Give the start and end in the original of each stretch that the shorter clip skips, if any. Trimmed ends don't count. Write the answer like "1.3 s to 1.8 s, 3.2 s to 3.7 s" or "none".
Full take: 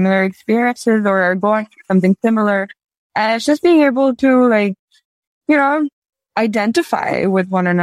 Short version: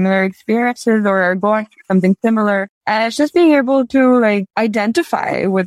2.7 s to 3.0 s, 4.8 s to 6.3 s